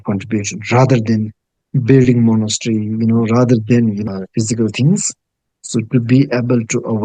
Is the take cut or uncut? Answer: uncut